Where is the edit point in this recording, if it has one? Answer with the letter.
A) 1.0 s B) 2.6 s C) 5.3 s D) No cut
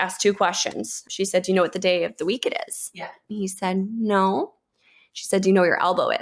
A